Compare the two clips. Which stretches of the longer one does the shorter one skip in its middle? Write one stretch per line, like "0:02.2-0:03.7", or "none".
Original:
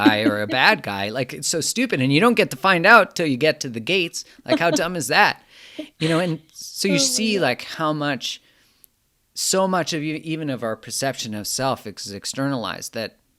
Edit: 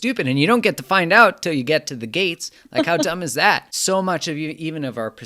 0:05.4-0:09.4